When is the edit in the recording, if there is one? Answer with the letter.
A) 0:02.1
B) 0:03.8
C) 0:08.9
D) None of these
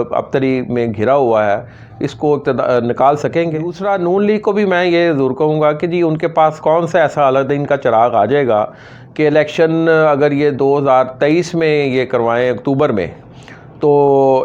B